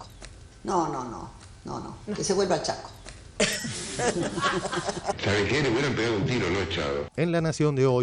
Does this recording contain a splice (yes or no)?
no